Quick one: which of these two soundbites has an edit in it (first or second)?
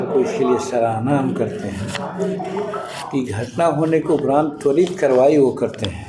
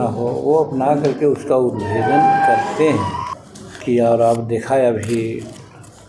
second